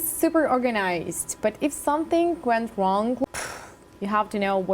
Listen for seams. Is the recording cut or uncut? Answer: cut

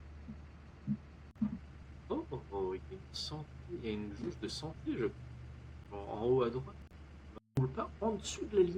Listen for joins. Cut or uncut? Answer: cut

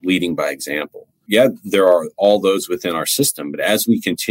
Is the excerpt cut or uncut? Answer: cut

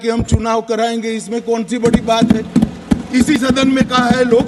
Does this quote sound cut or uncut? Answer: uncut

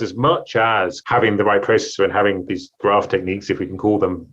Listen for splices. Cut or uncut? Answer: cut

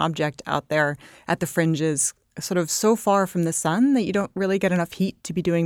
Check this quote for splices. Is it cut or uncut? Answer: uncut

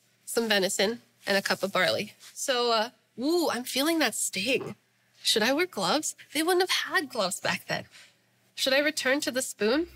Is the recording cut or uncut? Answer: uncut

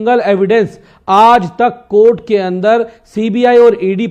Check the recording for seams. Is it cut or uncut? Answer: uncut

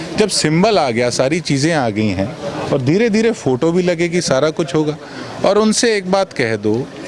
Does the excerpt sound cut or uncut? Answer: uncut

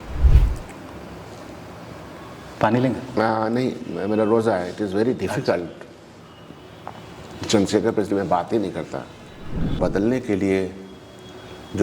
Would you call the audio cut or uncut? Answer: cut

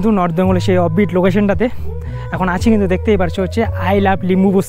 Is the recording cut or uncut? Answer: uncut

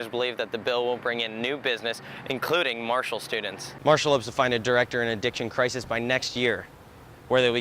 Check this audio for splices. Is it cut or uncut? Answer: cut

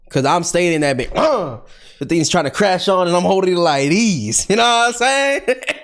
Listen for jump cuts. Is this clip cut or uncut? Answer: uncut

